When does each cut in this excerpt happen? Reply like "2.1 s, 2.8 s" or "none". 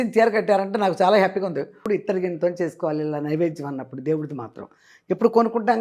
1.8 s